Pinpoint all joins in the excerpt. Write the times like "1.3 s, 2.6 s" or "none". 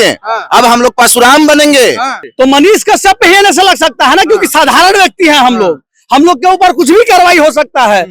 2.2 s